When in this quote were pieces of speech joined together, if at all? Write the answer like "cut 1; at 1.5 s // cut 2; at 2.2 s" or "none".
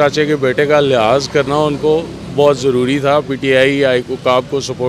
none